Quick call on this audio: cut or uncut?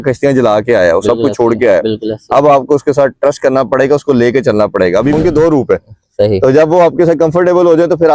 cut